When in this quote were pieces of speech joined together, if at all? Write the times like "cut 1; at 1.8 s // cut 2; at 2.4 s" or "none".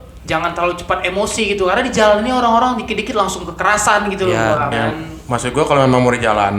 cut 1; at 4.7 s